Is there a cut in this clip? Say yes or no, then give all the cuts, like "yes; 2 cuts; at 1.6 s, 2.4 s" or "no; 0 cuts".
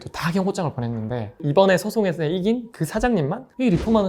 yes; 1 cut; at 1.4 s